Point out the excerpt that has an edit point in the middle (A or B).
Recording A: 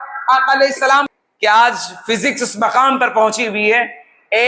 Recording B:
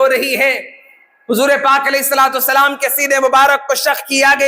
A